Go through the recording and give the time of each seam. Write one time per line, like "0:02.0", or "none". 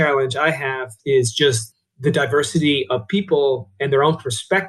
0:00.9